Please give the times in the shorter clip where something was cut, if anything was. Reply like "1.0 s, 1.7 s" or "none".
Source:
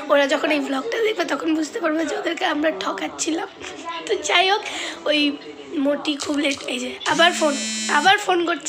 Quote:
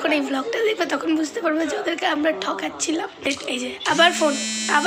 3.3 s